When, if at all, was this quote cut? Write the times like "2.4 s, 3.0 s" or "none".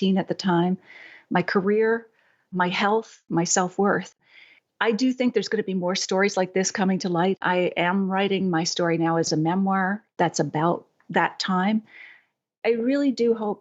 3.2 s, 4.2 s, 7.4 s, 9.3 s